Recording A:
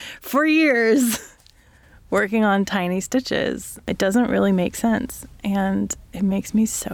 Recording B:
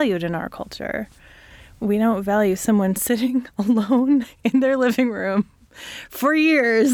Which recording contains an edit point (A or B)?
B